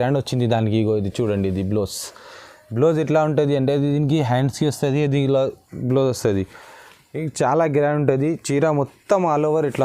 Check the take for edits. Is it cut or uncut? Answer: uncut